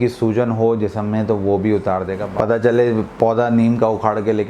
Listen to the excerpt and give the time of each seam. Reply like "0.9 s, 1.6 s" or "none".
2.2 s